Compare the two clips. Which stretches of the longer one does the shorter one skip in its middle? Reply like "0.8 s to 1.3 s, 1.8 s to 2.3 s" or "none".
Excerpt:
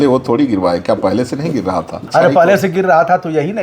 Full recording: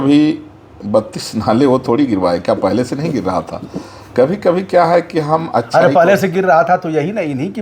3.7 s to 5.7 s